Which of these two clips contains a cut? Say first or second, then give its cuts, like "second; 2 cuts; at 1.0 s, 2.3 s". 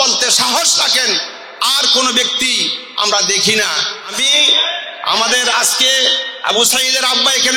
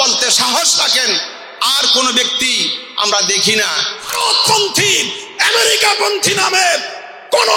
second; 1 cut; at 4.0 s